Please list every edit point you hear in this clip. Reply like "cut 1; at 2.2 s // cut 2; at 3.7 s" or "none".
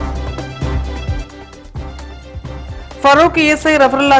cut 1; at 2.7 s